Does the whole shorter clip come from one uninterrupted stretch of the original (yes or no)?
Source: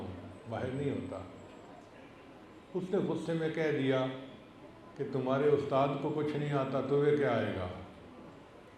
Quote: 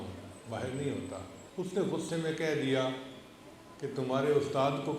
no